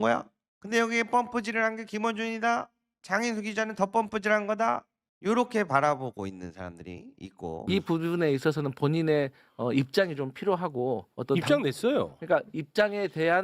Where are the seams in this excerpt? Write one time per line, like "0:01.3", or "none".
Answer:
0:07.7